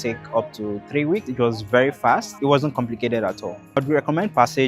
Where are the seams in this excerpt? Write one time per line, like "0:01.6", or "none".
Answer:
0:01.3
0:02.3
0:03.8